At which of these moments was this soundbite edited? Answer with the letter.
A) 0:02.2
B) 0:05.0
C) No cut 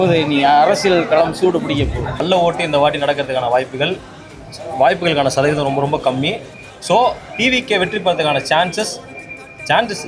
A